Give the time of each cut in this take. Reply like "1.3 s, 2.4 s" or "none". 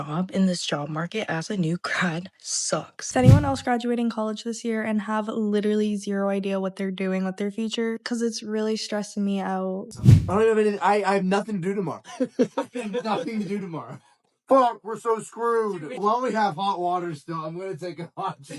3.0 s, 9.9 s